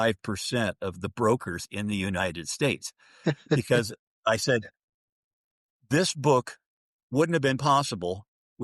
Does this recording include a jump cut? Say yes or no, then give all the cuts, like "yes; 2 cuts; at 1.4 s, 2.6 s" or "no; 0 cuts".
no; 0 cuts